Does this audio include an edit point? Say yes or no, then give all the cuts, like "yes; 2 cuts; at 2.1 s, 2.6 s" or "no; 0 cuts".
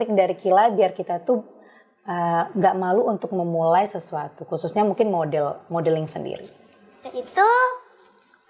no; 0 cuts